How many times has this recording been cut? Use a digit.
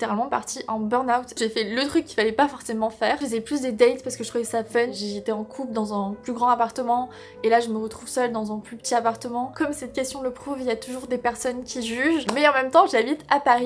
5